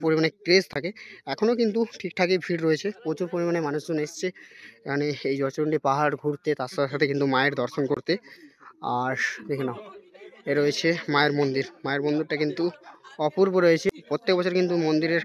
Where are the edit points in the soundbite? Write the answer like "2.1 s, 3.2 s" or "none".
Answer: 14.0 s